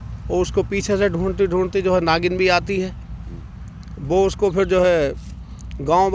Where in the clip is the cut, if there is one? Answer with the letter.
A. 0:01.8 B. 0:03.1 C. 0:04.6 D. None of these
D